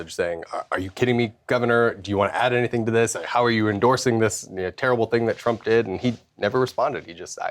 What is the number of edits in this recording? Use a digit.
0